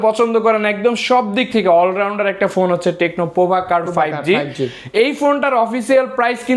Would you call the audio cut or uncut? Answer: uncut